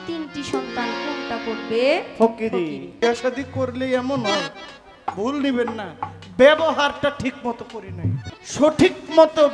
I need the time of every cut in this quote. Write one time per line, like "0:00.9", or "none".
0:03.0
0:08.3